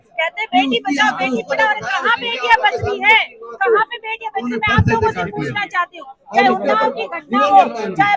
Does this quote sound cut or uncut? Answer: uncut